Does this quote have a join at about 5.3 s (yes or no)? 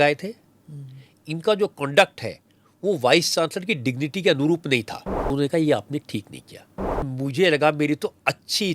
yes